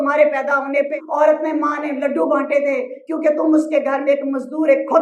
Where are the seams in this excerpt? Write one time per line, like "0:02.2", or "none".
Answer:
0:01.0